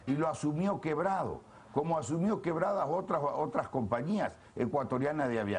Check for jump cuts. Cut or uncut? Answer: cut